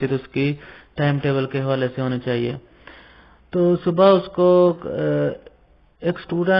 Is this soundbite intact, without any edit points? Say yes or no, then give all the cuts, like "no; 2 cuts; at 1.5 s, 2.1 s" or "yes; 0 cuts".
yes; 0 cuts